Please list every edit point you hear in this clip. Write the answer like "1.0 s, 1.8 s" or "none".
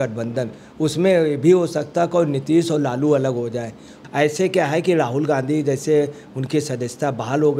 3.9 s

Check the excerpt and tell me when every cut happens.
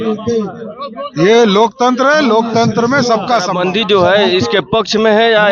3.5 s

